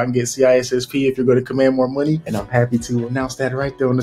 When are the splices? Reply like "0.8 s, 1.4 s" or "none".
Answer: 3.0 s